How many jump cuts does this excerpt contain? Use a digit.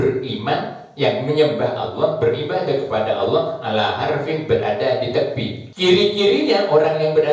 1